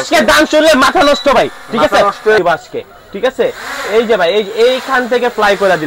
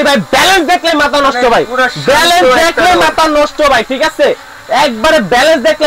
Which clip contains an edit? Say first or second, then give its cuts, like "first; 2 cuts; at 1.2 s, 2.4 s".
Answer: first; 1 cut; at 2.4 s